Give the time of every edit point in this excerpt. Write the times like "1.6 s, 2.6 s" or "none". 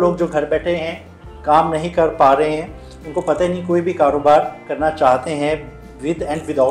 none